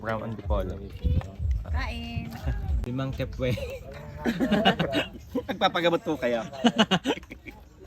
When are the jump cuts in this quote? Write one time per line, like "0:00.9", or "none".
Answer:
0:02.8